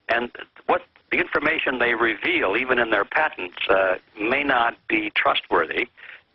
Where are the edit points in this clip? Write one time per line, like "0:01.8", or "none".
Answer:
0:04.1